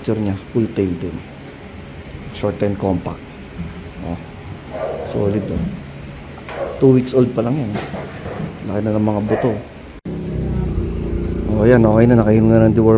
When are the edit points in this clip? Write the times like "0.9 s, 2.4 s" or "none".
10.0 s